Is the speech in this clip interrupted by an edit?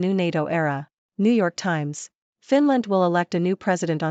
no; 0 cuts

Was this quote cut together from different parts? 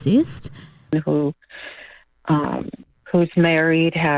yes; 1 cut; at 0.9 s

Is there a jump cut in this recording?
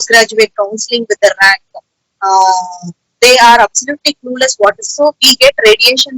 yes; 1 cut; at 4.9 s

